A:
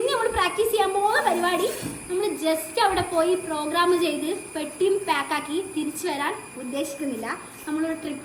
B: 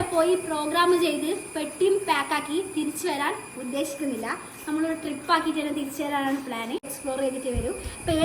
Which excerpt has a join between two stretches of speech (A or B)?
B